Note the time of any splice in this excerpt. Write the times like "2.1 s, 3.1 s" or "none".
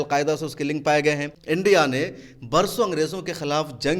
1.3 s